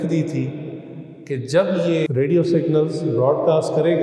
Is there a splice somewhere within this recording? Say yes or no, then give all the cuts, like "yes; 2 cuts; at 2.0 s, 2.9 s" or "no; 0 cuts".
yes; 1 cut; at 2.1 s